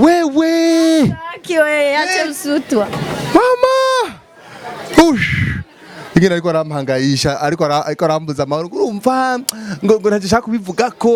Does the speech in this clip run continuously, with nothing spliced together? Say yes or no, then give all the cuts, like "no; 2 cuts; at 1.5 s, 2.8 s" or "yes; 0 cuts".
yes; 0 cuts